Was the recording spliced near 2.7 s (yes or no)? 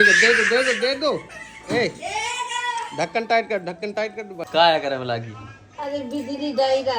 no